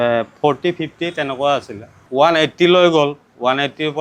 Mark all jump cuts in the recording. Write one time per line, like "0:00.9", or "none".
0:02.0